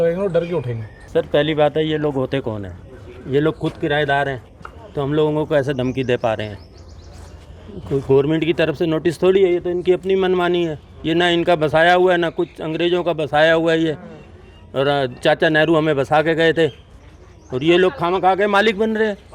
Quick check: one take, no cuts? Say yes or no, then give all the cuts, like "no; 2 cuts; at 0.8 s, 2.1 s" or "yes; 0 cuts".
no; 1 cut; at 1.0 s